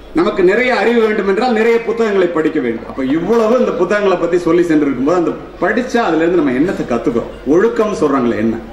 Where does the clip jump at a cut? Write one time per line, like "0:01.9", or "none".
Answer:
0:02.9